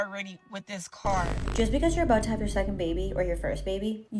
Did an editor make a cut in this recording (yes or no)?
yes